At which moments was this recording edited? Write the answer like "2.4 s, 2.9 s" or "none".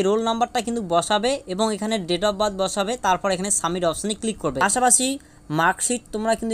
4.6 s